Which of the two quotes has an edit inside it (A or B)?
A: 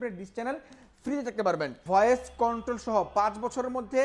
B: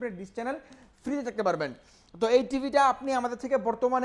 A